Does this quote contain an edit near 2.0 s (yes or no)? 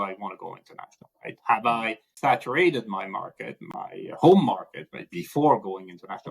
yes